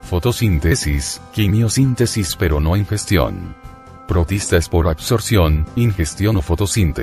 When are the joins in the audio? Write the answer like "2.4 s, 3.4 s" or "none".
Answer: 5.6 s

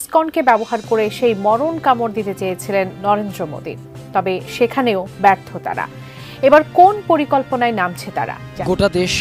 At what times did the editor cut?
none

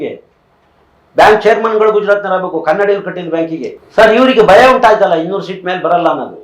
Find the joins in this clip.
3.8 s

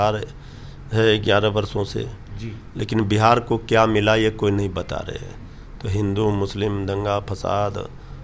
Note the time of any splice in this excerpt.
none

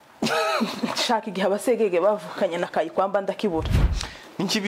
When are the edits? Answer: 3.7 s

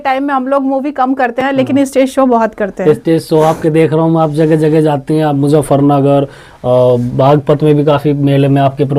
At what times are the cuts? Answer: none

